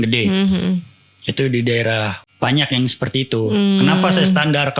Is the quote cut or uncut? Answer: cut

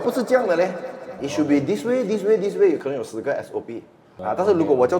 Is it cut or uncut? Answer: cut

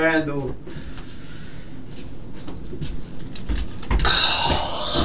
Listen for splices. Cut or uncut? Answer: uncut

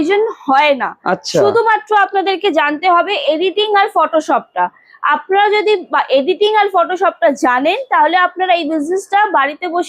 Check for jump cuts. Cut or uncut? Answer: uncut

